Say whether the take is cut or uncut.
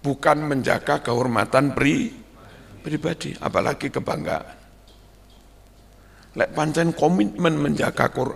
uncut